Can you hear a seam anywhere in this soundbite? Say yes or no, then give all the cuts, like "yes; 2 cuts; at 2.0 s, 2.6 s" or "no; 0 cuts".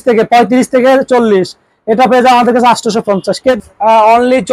yes; 1 cut; at 3.6 s